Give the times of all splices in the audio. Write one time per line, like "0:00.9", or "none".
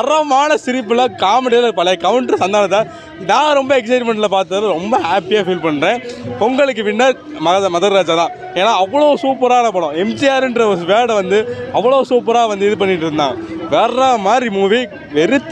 none